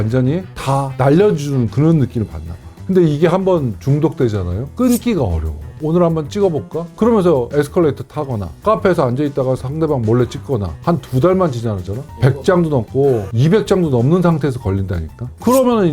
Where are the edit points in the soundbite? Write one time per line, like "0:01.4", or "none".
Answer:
0:08.6
0:10.7